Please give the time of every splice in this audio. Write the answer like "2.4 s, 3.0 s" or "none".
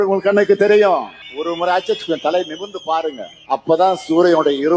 1.2 s, 3.3 s